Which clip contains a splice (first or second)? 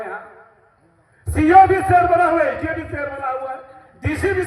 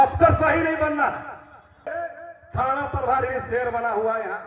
second